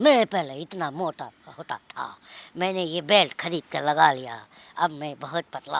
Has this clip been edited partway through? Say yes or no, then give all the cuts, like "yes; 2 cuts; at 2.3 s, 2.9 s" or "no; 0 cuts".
no; 0 cuts